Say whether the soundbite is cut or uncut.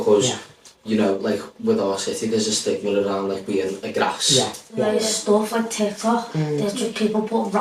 cut